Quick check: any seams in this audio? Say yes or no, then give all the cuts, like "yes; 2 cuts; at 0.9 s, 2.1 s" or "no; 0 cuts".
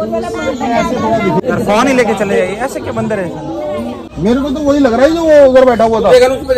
yes; 2 cuts; at 1.4 s, 4.1 s